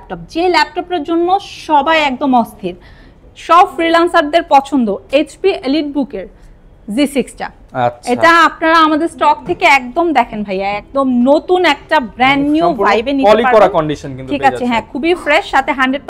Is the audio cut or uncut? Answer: uncut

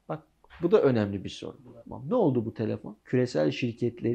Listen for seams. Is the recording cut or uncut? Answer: cut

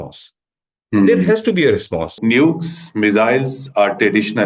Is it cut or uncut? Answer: cut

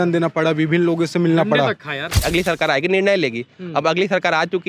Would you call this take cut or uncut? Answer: cut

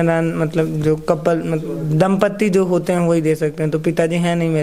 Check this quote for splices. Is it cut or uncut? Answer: uncut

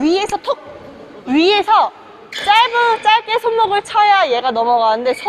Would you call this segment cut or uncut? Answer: uncut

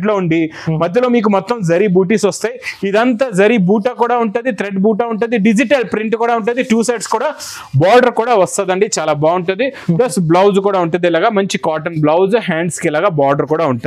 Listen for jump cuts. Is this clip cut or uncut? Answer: uncut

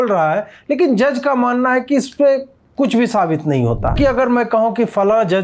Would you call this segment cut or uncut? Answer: cut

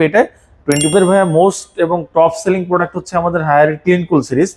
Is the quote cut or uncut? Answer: cut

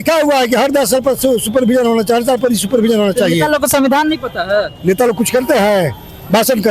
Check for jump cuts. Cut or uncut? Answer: uncut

